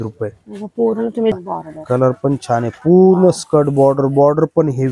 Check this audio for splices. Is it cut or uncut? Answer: cut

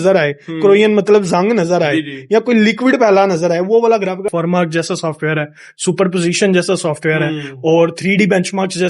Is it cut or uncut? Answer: cut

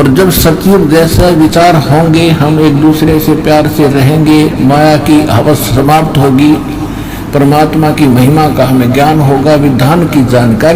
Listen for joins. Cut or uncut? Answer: uncut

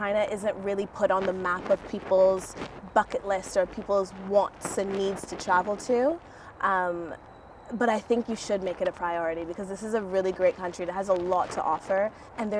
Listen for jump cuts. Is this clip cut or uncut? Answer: uncut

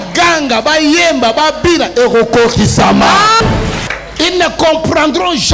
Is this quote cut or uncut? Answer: cut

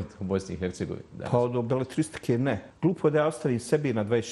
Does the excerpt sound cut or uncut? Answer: cut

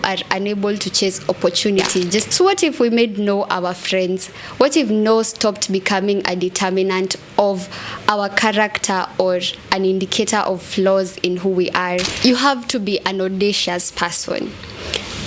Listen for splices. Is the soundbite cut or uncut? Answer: cut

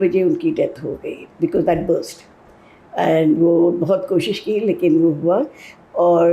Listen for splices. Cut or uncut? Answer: uncut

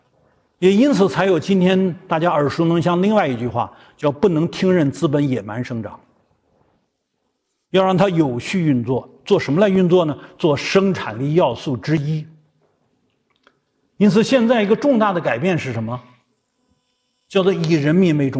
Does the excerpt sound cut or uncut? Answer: uncut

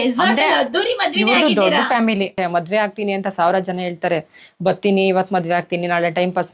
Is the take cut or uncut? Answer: cut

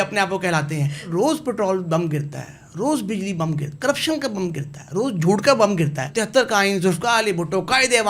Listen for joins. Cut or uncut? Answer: cut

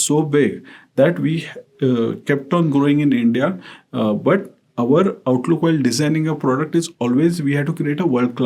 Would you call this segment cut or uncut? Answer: uncut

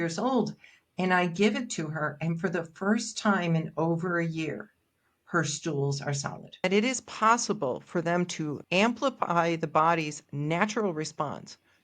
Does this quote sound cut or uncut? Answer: cut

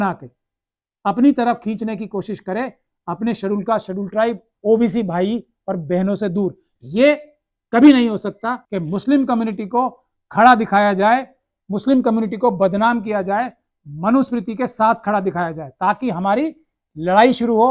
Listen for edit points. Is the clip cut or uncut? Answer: cut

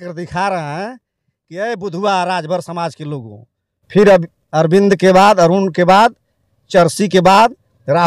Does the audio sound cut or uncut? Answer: uncut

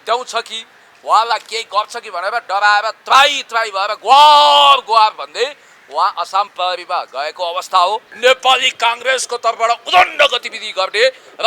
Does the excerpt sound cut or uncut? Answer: cut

